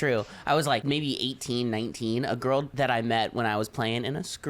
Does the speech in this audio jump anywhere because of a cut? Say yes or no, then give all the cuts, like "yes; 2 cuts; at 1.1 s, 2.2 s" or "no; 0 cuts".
yes; 2 cuts; at 0.8 s, 2.7 s